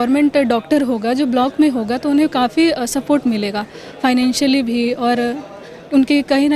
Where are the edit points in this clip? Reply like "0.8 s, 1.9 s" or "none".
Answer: none